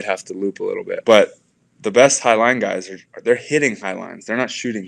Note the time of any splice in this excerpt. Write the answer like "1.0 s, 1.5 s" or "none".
1.0 s